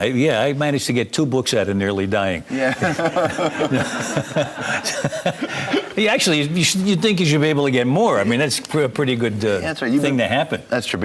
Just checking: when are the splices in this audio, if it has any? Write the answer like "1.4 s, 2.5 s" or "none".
6.1 s